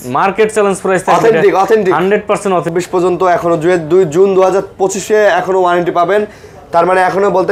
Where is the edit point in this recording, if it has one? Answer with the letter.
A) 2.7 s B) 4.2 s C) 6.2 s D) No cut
A